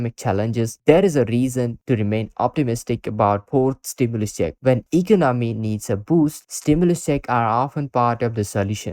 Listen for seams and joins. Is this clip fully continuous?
no; 1 cut; at 4.6 s

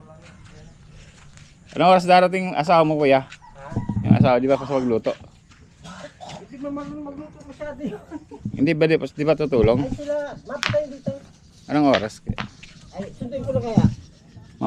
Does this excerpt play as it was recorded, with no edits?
yes; 0 cuts

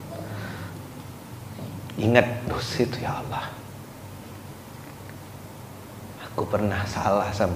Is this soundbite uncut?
yes; 0 cuts

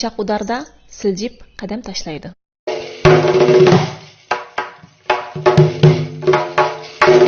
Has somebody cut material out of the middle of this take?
yes; 1 cut; at 2.8 s

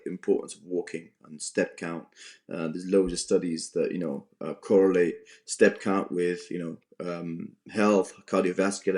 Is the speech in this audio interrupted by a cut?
no; 0 cuts

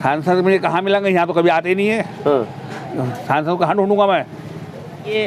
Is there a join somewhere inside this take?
no; 0 cuts

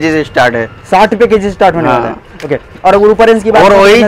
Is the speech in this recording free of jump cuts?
yes; 0 cuts

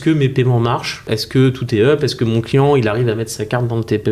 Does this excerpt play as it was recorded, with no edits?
no; 1 cut; at 1.1 s

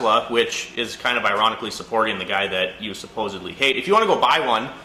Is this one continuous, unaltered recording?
yes; 0 cuts

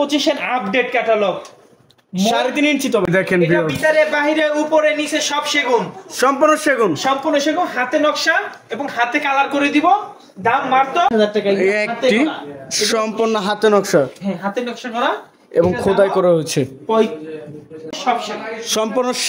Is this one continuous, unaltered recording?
no; 3 cuts; at 3.0 s, 11.1 s, 17.9 s

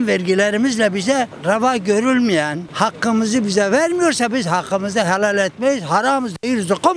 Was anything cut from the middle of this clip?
no; 0 cuts

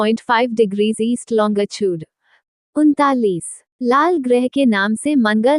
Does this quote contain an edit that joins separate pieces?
no; 0 cuts

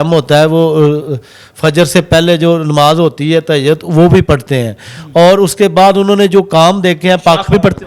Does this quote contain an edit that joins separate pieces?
no; 0 cuts

